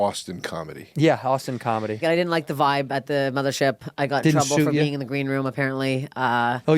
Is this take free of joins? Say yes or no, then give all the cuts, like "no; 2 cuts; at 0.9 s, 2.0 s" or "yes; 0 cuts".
no; 1 cut; at 2.0 s